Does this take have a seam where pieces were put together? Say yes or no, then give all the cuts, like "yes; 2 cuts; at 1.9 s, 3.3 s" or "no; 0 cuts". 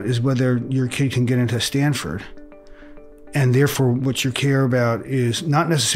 no; 0 cuts